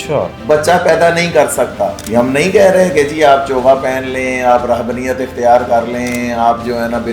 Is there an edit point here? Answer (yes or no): yes